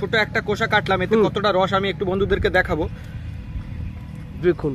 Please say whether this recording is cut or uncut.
uncut